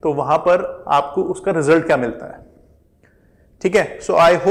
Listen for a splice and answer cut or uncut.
uncut